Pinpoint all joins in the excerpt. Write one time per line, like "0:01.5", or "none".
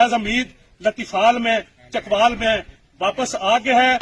none